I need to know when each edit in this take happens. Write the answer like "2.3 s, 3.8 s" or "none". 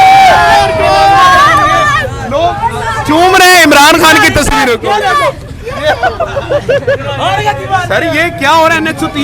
none